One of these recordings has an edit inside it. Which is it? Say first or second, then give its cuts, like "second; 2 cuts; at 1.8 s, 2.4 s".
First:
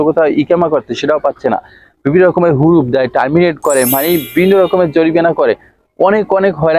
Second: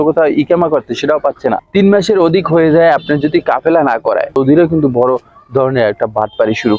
second; 2 cuts; at 1.6 s, 4.4 s